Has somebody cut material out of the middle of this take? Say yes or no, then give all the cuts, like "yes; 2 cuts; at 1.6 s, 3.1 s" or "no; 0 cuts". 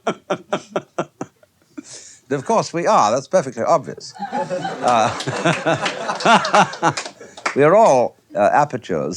no; 0 cuts